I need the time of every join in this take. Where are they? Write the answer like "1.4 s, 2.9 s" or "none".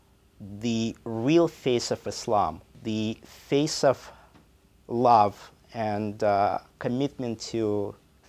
2.7 s